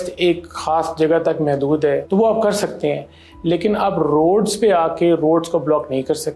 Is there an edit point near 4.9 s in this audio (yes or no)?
no